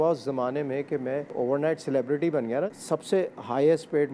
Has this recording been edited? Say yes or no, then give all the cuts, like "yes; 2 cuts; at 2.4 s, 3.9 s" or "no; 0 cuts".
yes; 2 cuts; at 1.3 s, 2.7 s